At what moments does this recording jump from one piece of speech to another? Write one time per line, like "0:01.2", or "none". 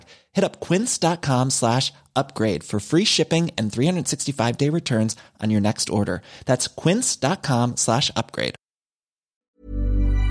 0:09.3